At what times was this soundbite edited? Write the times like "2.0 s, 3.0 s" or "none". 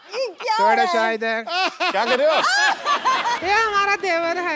3.4 s

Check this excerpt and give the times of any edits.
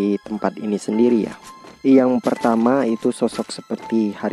none

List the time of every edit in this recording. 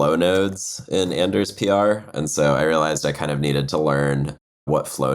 none

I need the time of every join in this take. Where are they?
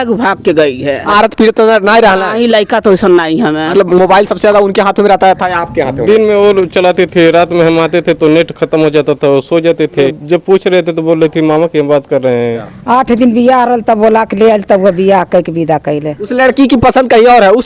1.1 s, 3.7 s, 10.1 s, 12.7 s, 16.2 s

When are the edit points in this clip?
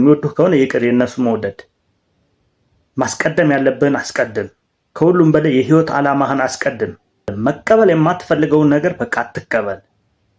7.3 s

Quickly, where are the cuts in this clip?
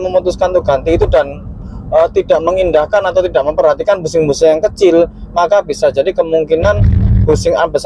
none

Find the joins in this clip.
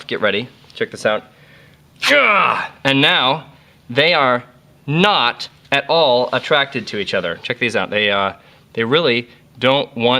2.3 s

